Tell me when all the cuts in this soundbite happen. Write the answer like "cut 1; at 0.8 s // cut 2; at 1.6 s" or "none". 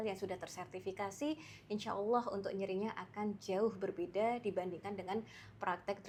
none